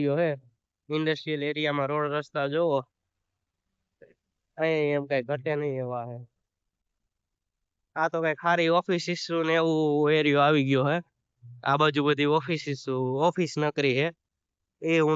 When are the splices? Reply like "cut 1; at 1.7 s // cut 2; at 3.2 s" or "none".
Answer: none